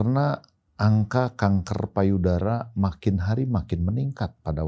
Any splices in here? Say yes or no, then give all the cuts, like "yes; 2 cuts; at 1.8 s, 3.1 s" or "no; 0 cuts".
no; 0 cuts